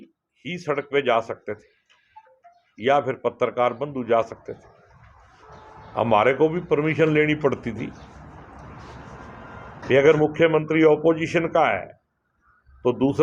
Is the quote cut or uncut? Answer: cut